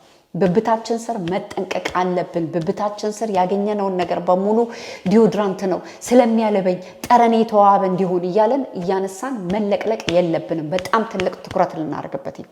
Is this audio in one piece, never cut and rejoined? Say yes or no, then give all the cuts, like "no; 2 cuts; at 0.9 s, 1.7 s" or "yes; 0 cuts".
yes; 0 cuts